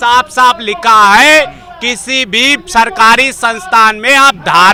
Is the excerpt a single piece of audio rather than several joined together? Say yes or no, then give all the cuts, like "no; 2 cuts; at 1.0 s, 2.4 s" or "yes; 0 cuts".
yes; 0 cuts